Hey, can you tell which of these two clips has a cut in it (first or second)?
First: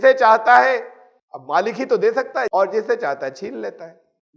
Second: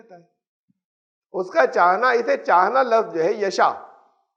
first